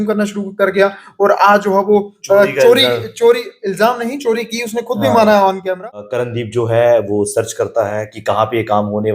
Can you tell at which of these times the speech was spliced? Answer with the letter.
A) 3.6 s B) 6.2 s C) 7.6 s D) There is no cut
B